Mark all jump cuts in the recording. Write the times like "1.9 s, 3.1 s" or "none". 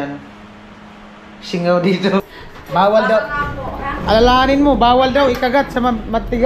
2.3 s

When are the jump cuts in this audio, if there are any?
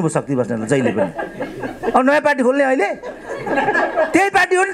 none

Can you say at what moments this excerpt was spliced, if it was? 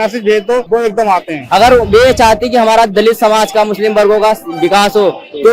1.0 s

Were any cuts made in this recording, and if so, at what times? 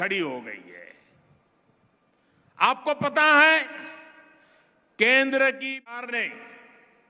5.9 s

